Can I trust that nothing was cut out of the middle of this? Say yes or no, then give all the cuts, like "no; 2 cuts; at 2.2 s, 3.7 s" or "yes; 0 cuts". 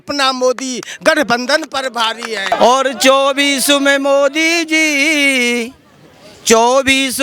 no; 1 cut; at 2.5 s